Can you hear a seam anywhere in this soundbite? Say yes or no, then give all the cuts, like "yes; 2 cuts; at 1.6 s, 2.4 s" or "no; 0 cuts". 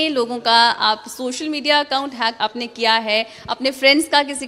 yes; 1 cut; at 2.4 s